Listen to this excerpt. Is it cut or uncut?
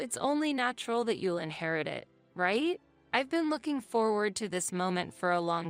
uncut